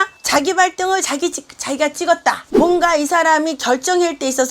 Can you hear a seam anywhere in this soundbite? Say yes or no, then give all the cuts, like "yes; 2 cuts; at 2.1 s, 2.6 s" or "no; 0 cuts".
yes; 1 cut; at 2.4 s